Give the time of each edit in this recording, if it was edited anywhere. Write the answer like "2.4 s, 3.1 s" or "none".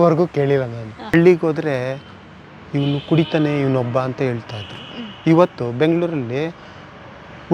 1.1 s